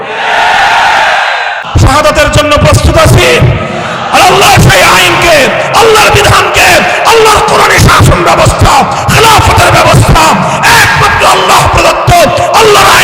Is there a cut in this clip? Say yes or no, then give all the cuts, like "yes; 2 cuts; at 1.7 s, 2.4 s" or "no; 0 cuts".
yes; 1 cut; at 1.6 s